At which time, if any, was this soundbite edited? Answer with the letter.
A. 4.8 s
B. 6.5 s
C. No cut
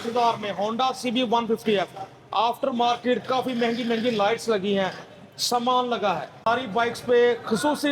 B